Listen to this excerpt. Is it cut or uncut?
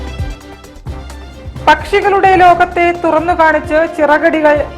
uncut